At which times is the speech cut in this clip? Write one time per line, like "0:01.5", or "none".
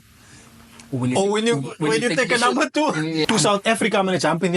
0:03.2